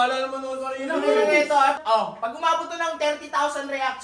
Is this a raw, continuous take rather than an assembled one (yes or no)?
no